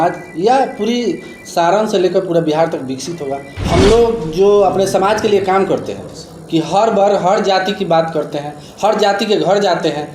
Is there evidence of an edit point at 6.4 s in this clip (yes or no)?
no